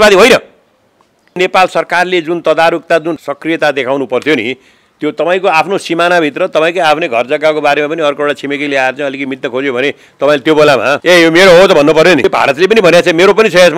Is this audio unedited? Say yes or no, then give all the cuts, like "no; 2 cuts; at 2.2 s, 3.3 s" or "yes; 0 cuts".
no; 4 cuts; at 1.4 s, 3.3 s, 11.0 s, 12.3 s